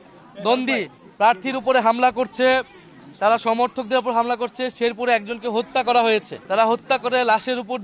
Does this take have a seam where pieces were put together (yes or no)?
yes